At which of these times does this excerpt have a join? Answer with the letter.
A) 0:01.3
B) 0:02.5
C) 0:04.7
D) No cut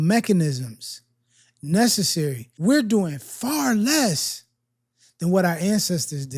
B